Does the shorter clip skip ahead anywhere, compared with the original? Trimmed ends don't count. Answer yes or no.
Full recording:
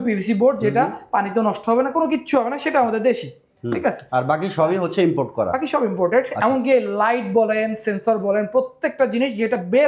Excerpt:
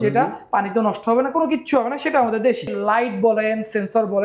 yes